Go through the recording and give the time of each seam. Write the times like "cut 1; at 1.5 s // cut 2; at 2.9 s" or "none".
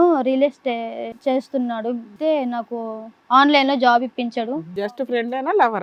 cut 1; at 1.1 s // cut 2; at 2.1 s // cut 3; at 4.8 s